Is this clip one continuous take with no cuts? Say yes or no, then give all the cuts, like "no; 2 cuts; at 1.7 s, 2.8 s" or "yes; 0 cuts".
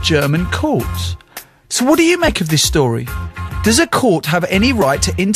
no; 1 cut; at 2.4 s